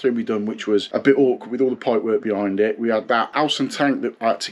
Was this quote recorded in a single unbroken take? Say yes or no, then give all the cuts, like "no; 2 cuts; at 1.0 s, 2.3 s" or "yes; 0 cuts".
no; 2 cuts; at 0.9 s, 3.3 s